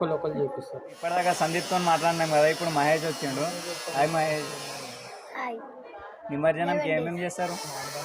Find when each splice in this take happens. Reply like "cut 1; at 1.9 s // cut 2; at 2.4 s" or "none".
cut 1; at 1.0 s // cut 2; at 5.9 s